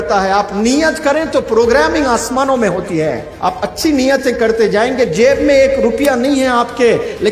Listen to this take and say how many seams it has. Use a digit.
1